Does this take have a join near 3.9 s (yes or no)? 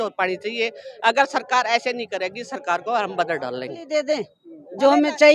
yes